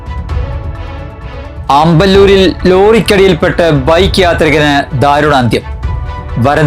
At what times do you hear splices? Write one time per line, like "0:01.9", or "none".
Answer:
0:01.6